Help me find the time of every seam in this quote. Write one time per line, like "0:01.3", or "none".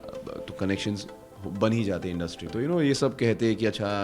0:02.4